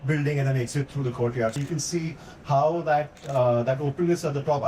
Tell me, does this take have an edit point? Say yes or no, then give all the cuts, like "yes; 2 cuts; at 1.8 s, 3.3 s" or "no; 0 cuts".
yes; 1 cut; at 1.6 s